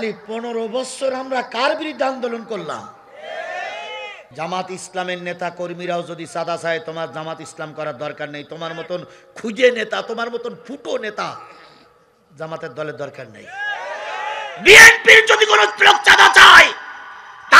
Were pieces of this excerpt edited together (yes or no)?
yes